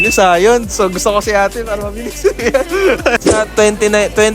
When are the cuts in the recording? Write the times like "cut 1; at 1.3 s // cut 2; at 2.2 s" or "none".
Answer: cut 1; at 3.4 s